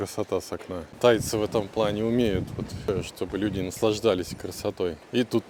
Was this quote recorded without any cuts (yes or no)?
yes